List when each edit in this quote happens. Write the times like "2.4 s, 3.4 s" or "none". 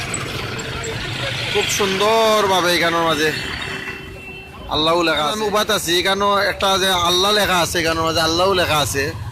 5.3 s